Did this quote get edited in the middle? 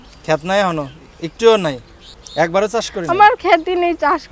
yes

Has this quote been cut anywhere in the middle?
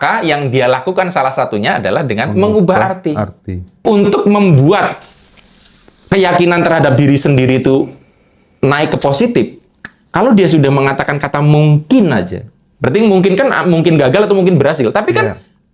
yes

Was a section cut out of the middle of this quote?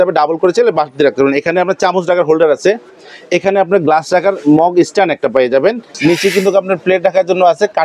yes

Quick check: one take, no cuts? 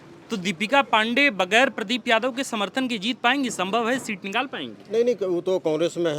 yes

